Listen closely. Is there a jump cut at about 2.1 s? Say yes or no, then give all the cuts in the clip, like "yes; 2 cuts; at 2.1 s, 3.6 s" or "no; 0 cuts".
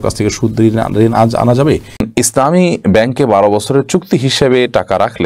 yes; 1 cut; at 2.1 s